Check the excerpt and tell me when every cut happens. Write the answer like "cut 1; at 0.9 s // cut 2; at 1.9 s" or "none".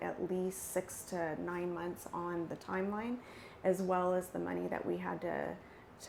none